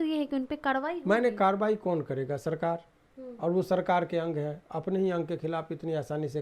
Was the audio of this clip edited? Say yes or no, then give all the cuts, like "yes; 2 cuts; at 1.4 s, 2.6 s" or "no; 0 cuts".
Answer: no; 0 cuts